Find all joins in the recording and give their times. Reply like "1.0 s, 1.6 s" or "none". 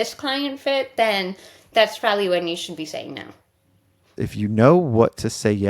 4.2 s